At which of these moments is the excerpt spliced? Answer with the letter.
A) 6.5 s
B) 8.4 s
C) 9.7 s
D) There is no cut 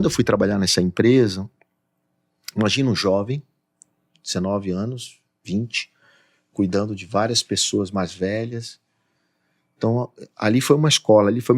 D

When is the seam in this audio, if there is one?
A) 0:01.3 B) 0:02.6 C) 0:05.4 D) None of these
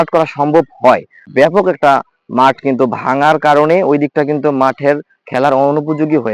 A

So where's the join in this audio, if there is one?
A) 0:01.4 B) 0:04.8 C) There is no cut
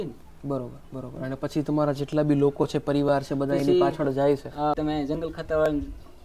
B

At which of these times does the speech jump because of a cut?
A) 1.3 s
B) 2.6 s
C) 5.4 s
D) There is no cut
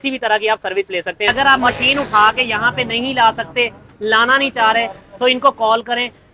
A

